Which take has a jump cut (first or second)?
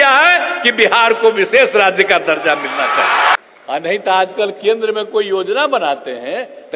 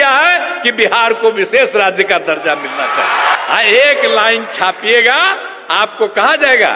first